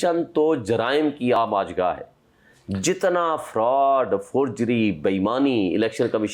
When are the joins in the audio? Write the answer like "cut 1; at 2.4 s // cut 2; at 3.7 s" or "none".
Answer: cut 1; at 1.4 s